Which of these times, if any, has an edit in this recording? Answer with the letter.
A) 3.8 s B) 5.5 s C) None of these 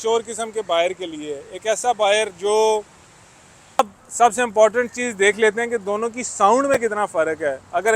A